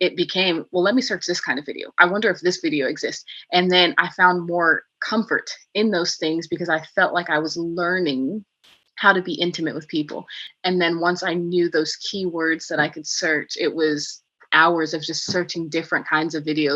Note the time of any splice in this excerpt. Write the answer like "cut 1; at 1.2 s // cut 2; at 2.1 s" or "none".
cut 1; at 10.4 s